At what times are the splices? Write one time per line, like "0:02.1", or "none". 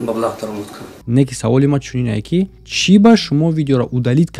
none